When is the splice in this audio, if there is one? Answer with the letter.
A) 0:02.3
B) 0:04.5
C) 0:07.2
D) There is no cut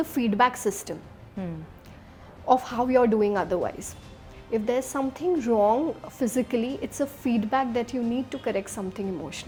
D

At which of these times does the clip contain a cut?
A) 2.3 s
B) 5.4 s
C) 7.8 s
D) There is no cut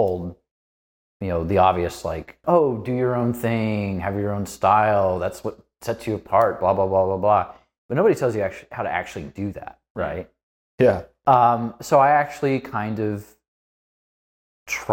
A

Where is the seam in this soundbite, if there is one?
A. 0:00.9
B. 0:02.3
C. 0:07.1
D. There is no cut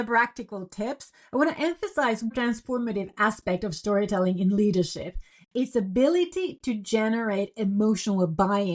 B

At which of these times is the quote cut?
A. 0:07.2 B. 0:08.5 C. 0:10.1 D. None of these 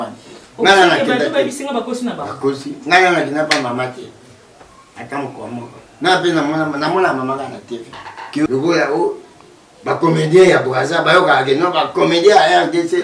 B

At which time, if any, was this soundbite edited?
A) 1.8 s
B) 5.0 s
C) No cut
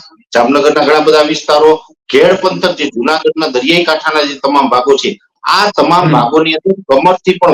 C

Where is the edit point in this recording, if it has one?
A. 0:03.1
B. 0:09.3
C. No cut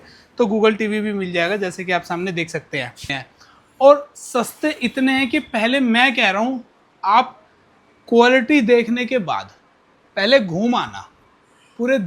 A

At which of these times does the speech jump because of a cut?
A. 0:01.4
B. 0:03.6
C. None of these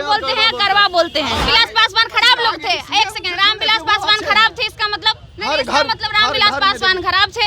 A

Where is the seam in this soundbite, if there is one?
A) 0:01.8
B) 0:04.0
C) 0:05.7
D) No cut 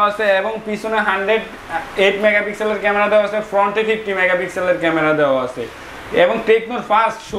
D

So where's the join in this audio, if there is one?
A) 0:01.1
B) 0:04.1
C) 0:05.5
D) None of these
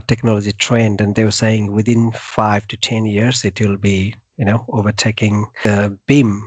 C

